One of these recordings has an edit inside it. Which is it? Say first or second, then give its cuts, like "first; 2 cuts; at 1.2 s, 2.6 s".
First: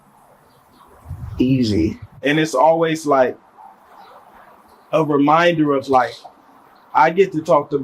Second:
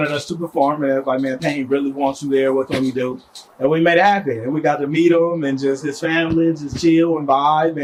first; 1 cut; at 2.1 s